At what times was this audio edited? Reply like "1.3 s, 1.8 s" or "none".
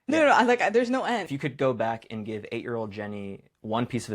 1.3 s